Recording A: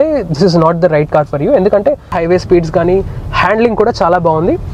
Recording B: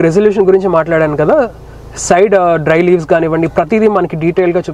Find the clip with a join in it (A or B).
A